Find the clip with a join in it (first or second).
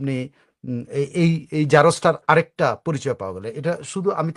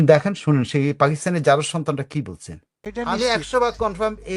second